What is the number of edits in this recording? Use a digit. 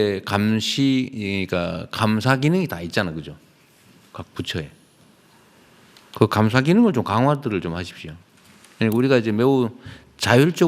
0